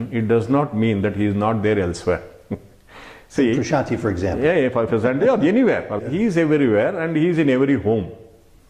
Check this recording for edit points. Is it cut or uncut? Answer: cut